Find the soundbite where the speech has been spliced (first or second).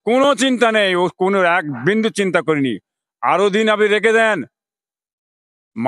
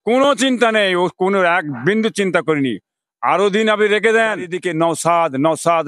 second